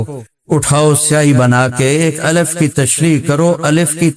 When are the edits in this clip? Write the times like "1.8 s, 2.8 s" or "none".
none

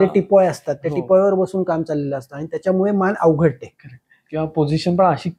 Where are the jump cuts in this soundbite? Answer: none

